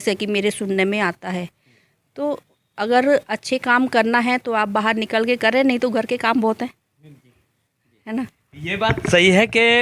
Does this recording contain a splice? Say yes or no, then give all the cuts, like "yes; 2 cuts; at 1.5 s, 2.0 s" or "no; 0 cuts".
no; 0 cuts